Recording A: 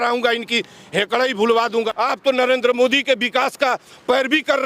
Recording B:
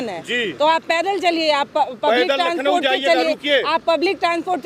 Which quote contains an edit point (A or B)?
A